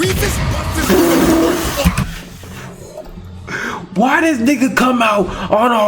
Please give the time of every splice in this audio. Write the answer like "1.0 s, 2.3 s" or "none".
none